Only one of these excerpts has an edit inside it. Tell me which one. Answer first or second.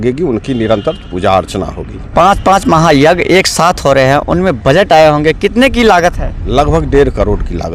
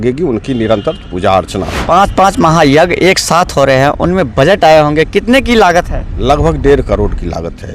second